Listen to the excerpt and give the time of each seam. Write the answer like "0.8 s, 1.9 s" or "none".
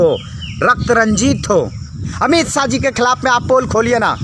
2.1 s